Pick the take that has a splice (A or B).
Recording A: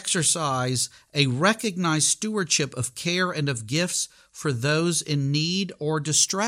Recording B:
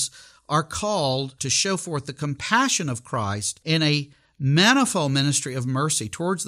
B